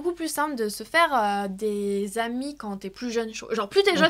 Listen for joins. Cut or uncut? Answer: uncut